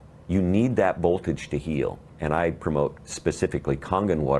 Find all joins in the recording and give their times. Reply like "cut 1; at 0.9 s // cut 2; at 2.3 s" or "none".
cut 1; at 2.1 s